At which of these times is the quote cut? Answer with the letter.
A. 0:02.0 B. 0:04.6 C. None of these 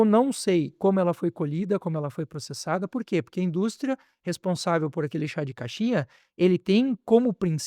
C